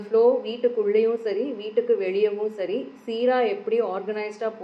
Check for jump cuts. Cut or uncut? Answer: uncut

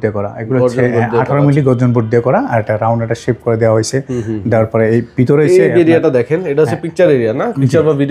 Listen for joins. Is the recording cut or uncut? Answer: uncut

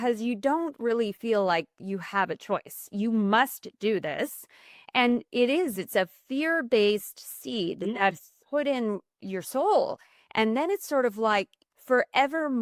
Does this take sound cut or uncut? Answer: uncut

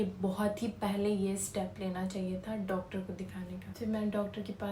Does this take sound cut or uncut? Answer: uncut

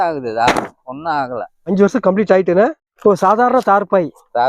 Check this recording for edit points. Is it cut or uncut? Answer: cut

